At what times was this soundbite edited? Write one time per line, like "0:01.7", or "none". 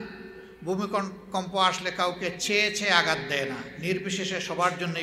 none